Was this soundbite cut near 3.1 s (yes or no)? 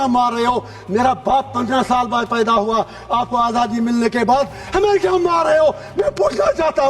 no